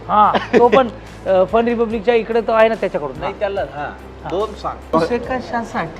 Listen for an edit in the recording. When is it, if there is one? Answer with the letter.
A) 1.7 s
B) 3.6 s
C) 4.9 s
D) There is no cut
C